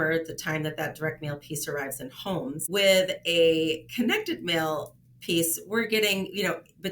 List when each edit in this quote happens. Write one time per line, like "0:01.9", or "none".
0:02.6